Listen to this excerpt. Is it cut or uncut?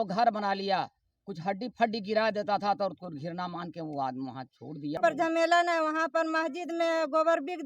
cut